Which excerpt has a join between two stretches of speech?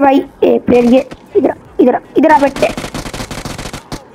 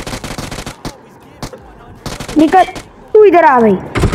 second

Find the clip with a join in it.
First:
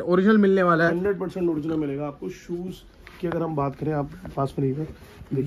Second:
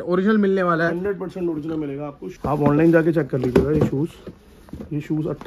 second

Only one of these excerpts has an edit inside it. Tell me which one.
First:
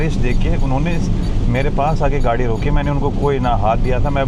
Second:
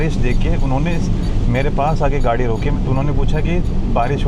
second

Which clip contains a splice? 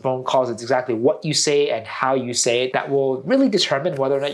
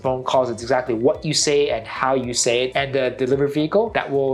first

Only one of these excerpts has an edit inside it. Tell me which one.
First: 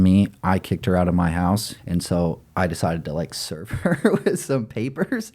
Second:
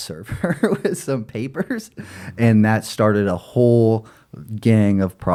first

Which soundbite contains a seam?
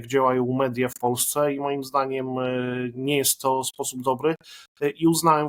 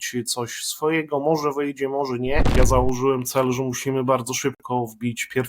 second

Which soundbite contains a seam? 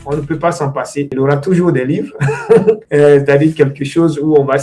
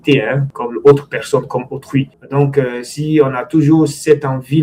first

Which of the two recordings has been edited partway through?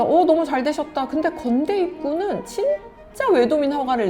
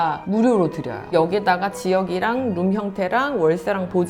second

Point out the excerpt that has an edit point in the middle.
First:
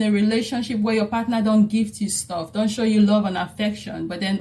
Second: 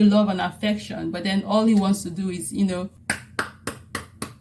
second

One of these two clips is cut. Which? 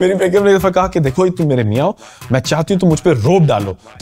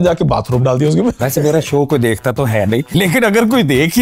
second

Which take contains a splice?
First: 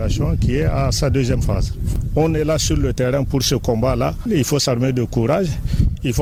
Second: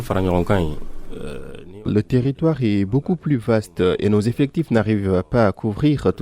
second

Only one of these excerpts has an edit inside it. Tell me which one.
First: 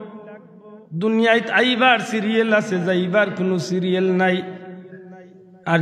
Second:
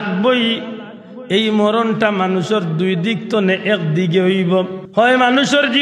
second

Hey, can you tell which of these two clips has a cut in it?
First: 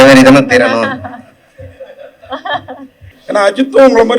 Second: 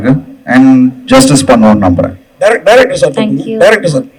first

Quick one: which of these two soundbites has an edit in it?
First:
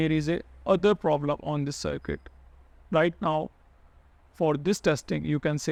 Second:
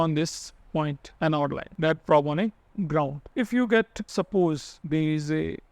second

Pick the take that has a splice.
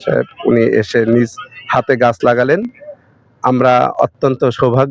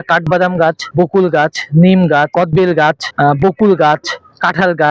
second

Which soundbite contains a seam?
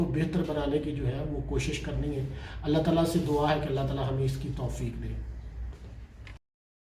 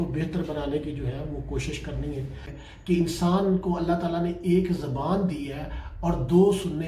second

